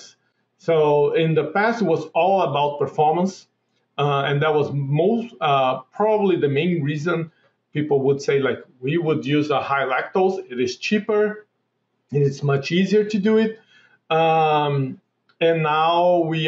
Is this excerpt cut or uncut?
uncut